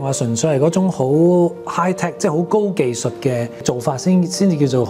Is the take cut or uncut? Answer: cut